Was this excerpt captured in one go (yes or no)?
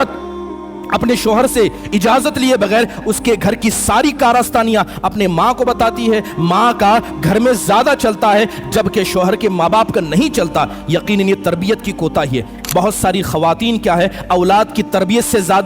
no